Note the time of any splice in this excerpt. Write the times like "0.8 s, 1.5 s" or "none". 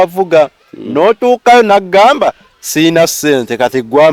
none